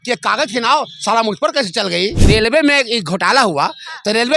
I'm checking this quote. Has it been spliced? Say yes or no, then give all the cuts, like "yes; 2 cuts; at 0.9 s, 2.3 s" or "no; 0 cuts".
yes; 1 cut; at 2.2 s